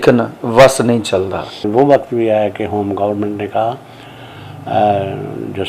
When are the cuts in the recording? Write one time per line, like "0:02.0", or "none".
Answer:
0:01.6